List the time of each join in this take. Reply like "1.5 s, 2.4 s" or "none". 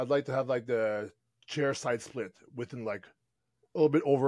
none